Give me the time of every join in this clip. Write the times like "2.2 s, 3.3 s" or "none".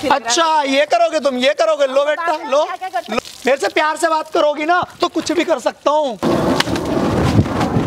3.2 s, 6.2 s